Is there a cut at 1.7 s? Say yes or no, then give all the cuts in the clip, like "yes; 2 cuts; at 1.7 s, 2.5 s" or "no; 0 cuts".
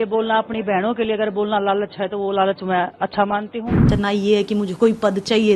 no; 1 cut; at 3.9 s